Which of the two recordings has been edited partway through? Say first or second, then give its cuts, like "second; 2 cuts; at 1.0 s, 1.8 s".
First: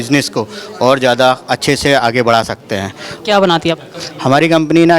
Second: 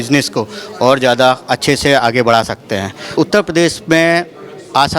second; 1 cut; at 3.1 s